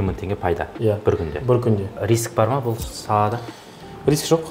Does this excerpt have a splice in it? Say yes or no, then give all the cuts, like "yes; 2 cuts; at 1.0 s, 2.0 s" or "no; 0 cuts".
yes; 1 cut; at 2.0 s